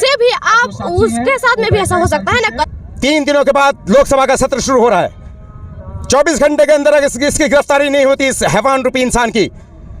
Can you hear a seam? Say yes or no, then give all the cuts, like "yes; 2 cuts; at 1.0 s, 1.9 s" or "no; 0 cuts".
yes; 1 cut; at 2.6 s